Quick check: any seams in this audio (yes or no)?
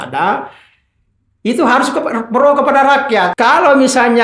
yes